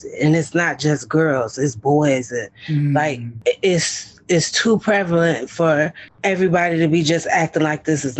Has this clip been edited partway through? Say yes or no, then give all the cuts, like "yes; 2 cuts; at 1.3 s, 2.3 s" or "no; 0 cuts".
yes; 2 cuts; at 3.3 s, 6.1 s